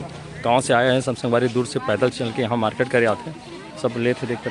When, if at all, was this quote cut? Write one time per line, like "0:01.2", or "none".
none